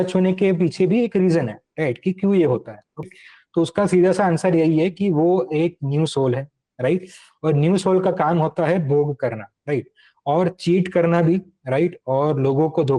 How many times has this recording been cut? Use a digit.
1